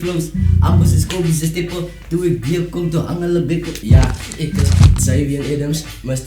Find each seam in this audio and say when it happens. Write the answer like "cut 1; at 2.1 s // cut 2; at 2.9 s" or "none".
cut 1; at 3.7 s